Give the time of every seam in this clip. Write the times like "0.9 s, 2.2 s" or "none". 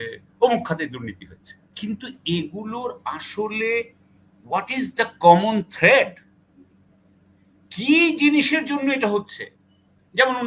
none